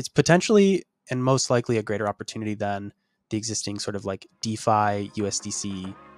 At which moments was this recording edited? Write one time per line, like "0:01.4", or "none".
none